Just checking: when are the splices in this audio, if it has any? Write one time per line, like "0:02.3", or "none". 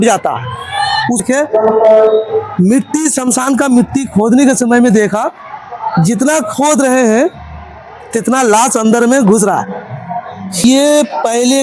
0:01.2
0:10.6